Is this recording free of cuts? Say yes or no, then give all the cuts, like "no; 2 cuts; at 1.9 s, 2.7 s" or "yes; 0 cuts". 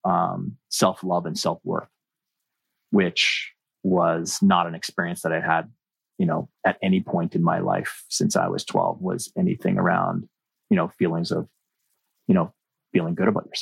yes; 0 cuts